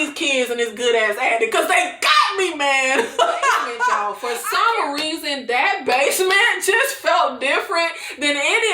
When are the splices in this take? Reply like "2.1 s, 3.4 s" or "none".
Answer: 4.1 s